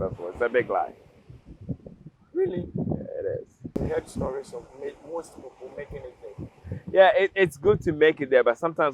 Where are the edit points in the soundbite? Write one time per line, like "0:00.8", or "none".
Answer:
0:03.7